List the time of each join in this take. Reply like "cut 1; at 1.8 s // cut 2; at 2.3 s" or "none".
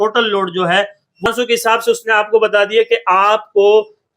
cut 1; at 1.2 s